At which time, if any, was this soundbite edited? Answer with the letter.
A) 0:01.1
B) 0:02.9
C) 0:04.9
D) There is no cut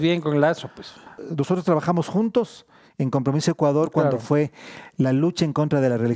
A